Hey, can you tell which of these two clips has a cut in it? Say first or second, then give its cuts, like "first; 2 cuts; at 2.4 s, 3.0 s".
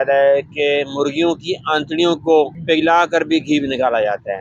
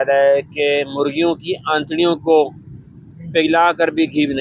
first; 1 cut; at 2.6 s